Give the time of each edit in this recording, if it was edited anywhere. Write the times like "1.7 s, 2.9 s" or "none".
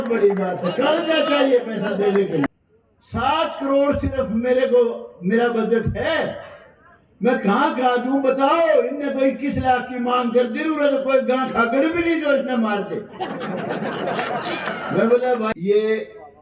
2.5 s, 15.5 s